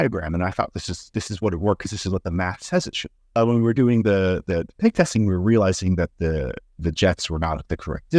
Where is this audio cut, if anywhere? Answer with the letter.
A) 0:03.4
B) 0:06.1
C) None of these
A